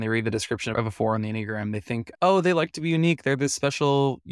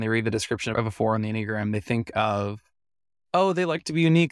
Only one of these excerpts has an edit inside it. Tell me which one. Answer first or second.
first